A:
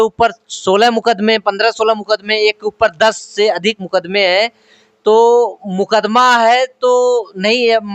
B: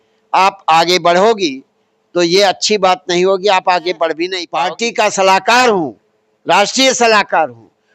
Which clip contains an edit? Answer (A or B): B